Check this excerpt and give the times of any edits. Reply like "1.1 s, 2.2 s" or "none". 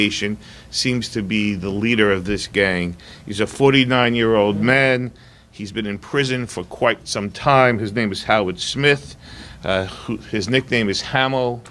none